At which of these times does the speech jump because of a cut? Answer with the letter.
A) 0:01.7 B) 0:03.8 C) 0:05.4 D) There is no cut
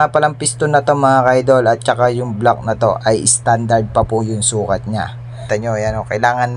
C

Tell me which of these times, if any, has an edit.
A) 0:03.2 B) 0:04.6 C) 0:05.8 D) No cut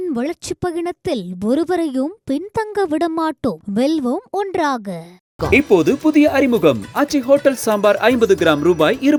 D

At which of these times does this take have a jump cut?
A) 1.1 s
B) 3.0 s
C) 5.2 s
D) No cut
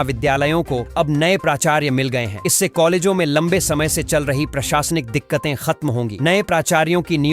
D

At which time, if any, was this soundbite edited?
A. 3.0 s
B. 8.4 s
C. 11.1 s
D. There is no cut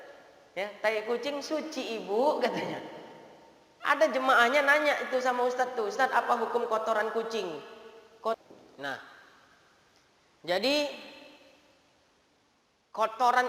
B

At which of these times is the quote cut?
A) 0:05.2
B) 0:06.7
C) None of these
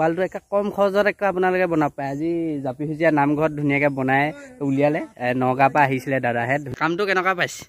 B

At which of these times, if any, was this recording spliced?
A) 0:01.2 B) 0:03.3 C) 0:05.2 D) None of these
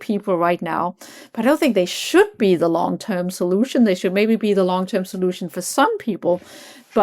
D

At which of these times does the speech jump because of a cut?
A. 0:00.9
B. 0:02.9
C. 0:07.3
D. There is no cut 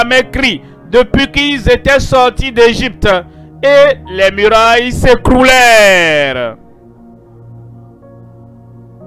C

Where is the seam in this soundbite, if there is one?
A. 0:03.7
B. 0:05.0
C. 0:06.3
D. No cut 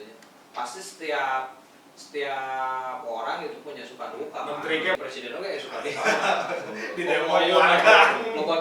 B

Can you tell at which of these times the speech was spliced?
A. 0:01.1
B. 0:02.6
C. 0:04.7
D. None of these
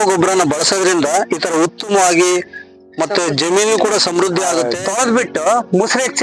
C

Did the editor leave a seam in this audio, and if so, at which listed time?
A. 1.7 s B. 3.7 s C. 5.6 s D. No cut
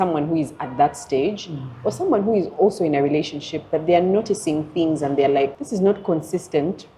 C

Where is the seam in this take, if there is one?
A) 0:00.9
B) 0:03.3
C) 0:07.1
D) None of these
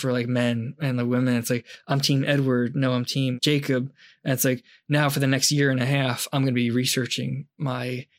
B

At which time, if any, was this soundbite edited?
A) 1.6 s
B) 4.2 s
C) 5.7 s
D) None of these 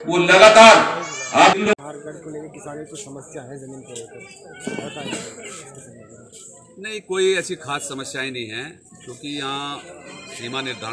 A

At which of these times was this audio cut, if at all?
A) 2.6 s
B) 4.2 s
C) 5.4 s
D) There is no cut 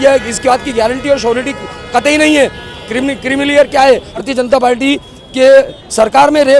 B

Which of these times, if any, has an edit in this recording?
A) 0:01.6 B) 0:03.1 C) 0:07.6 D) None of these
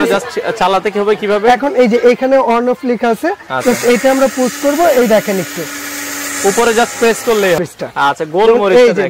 C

